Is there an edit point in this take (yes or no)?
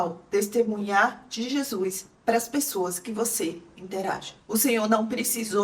yes